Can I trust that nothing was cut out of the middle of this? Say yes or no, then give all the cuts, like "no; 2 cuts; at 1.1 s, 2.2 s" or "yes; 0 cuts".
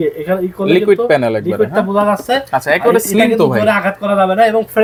yes; 0 cuts